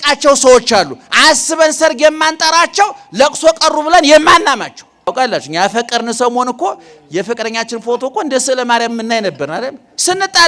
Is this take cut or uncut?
cut